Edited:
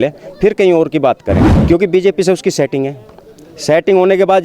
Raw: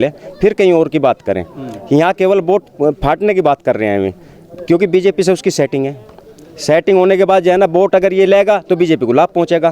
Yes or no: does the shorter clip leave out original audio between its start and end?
yes